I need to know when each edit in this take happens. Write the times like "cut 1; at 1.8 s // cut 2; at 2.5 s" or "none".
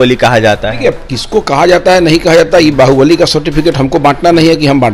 none